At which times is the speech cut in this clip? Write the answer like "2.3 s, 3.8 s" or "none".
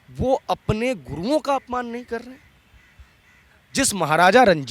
none